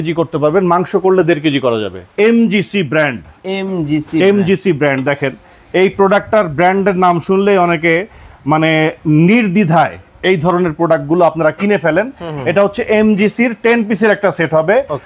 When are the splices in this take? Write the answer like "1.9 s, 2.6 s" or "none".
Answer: 2.0 s